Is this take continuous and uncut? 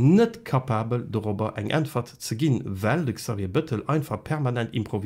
yes; 0 cuts

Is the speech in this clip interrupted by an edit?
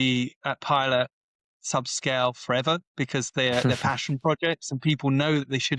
no; 0 cuts

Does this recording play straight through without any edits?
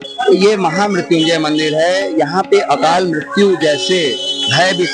yes; 0 cuts

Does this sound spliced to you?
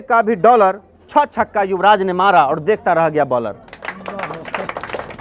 no; 0 cuts

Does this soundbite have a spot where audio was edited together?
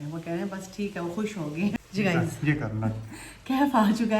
yes; 1 cut; at 1.7 s

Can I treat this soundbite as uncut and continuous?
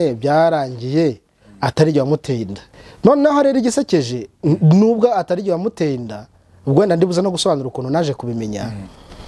no; 1 cut; at 2.9 s

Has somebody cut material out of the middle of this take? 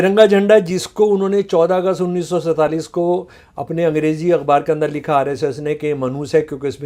no; 0 cuts

